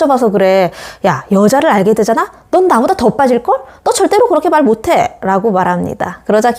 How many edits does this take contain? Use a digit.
0